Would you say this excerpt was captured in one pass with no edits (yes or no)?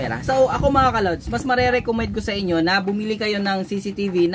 yes